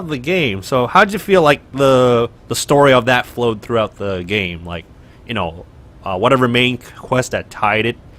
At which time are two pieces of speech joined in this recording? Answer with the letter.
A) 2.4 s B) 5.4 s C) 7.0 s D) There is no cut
B